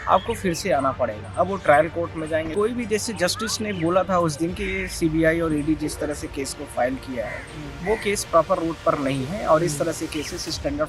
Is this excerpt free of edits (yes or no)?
no